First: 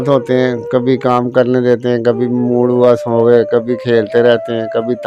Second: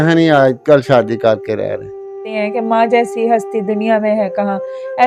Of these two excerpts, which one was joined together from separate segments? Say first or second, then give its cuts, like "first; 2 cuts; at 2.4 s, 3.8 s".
second; 1 cut; at 2.3 s